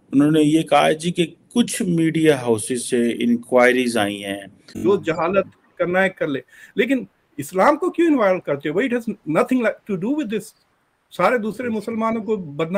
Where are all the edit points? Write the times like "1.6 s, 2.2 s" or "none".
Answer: 4.8 s